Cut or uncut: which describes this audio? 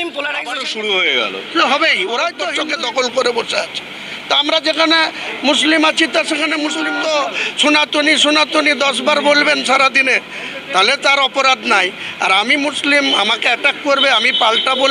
cut